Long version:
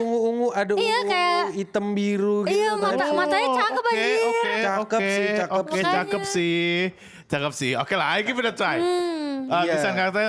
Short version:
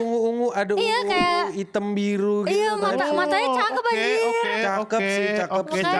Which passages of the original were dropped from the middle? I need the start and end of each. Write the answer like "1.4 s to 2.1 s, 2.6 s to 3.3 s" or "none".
none